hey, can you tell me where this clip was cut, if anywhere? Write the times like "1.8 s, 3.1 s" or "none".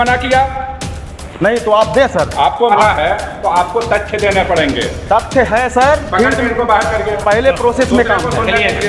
2.7 s